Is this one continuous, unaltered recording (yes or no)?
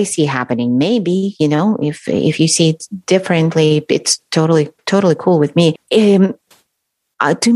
yes